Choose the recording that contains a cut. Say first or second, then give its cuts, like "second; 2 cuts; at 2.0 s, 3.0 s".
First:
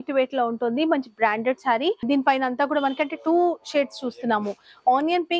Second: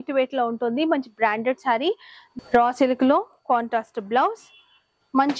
second; 1 cut; at 2.0 s